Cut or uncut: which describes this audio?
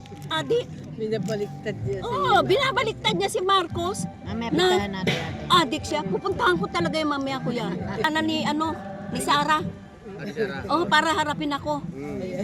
cut